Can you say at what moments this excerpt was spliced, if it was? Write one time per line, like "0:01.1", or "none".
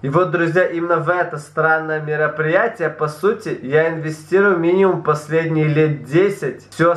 none